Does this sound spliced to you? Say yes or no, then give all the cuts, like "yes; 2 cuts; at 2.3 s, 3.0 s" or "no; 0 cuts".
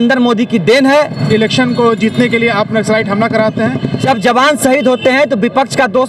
yes; 2 cuts; at 1.2 s, 4.0 s